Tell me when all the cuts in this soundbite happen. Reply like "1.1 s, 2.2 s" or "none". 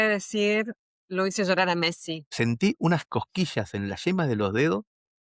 2.2 s